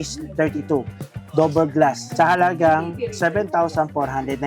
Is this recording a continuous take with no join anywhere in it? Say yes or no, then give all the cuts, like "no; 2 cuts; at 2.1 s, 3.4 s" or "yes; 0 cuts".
no; 1 cut; at 2.0 s